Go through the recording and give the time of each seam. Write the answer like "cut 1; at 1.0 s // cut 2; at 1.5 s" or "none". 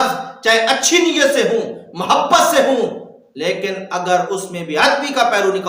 none